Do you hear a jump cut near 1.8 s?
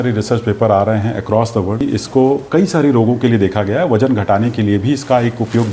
yes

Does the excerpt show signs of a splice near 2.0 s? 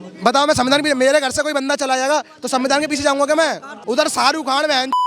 no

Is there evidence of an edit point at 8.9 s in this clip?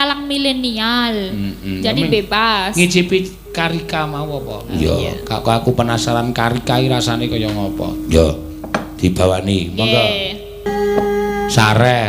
no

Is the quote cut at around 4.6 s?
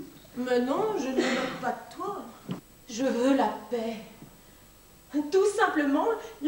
no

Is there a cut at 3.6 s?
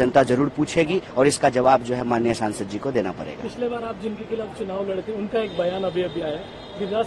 no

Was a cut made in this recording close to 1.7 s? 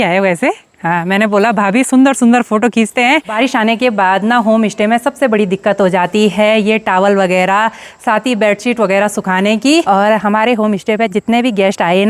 no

